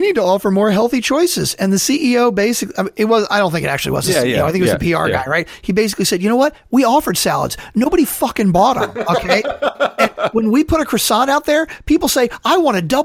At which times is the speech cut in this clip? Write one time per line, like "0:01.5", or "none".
none